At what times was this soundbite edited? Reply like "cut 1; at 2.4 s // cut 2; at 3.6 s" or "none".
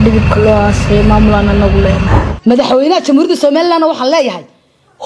cut 1; at 2.3 s